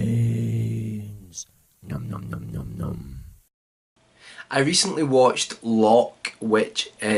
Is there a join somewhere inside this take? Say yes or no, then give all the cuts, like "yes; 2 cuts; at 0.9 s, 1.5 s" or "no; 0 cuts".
no; 0 cuts